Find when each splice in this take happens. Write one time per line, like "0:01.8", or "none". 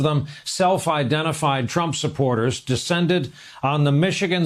none

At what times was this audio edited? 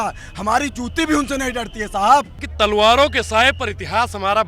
0:02.4

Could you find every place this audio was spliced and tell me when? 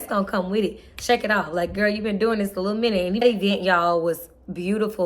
0:03.2

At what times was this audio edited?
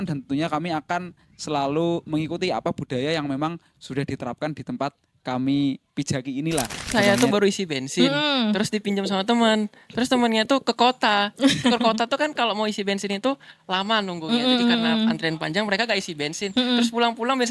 0:06.9

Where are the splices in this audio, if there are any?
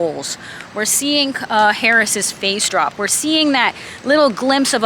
none

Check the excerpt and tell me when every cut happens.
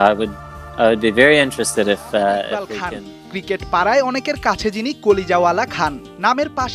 0:02.8

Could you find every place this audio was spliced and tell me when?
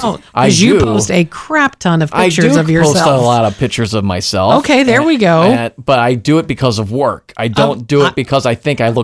none

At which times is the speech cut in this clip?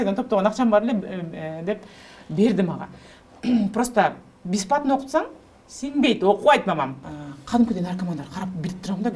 0:07.0

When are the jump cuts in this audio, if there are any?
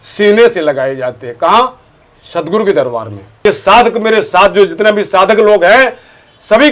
0:03.4

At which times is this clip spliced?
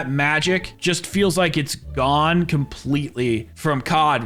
none

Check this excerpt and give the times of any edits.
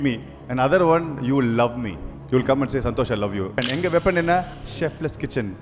0:03.6

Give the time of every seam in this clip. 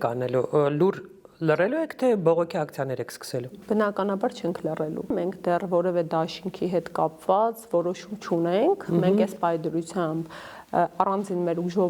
0:05.1

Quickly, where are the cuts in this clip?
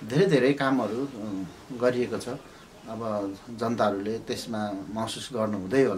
none

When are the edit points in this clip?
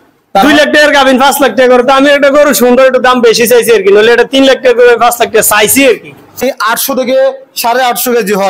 0:06.4

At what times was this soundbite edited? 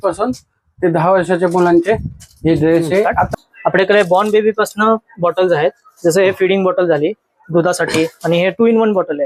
0:03.4

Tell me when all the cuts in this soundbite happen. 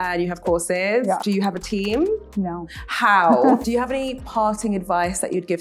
0:01.2
0:02.3
0:03.6

